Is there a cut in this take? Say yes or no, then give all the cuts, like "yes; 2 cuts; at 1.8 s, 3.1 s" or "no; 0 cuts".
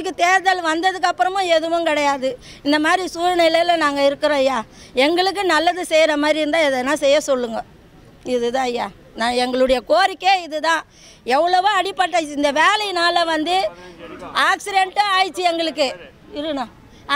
no; 0 cuts